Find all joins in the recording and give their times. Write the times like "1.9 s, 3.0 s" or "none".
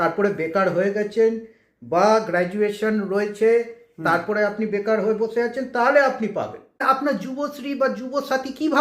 6.8 s